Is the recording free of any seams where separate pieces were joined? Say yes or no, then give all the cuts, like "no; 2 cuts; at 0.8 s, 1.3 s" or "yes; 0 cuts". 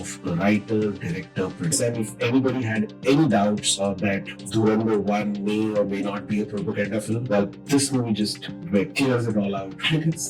no; 1 cut; at 1.8 s